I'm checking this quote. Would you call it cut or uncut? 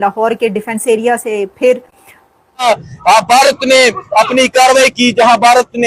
cut